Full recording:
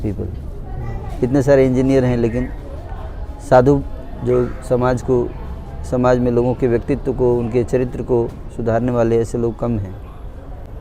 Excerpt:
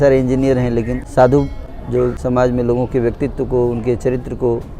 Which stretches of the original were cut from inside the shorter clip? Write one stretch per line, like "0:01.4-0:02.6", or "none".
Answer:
0:02.5-0:03.3
0:04.5-0:05.9